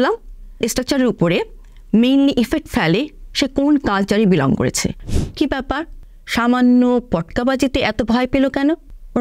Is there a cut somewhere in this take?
yes; 1 cut; at 5.0 s

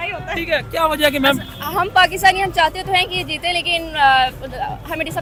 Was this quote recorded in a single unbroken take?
yes; 0 cuts

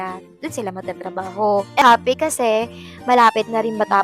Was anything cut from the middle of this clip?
yes; 1 cut; at 1.8 s

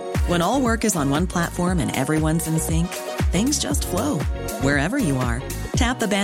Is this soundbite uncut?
yes; 0 cuts

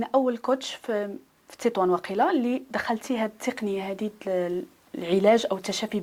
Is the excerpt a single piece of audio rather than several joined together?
yes; 0 cuts

